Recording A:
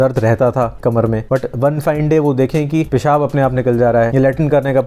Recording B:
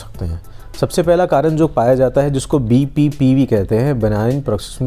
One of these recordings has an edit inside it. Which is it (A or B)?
A